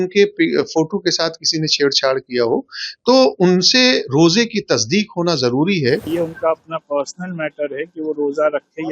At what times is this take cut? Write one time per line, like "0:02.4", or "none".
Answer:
0:06.1